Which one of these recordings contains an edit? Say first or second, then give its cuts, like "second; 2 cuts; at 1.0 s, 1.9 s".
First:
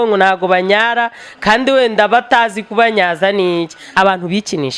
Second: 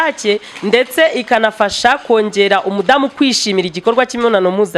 first; 1 cut; at 3.8 s